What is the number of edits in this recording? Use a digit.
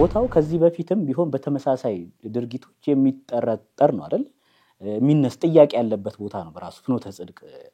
0